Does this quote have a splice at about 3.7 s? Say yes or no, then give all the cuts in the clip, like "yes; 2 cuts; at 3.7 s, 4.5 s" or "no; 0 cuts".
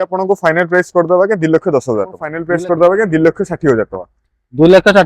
no; 1 cut; at 2.4 s